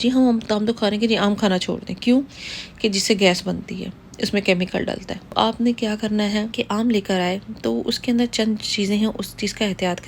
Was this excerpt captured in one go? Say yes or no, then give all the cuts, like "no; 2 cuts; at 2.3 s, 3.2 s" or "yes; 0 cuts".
no; 2 cuts; at 5.3 s, 6.5 s